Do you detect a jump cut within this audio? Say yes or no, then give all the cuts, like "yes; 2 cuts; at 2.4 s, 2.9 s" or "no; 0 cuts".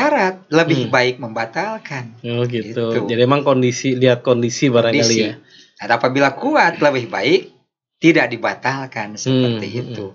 no; 0 cuts